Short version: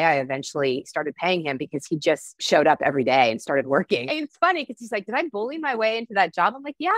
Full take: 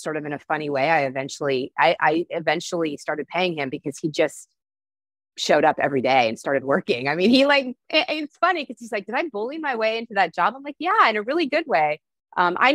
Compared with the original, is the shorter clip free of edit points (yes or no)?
no